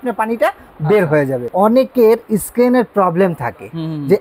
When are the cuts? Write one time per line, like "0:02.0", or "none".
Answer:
0:01.5